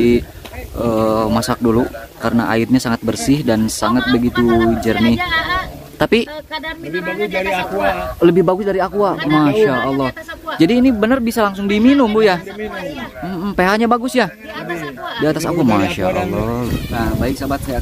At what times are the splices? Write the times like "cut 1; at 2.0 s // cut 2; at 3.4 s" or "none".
cut 1; at 16.7 s